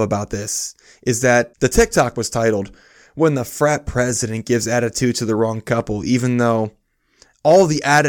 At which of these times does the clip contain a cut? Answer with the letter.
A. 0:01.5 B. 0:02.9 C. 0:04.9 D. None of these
A